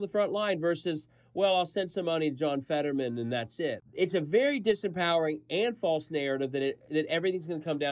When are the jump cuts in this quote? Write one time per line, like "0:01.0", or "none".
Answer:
0:03.8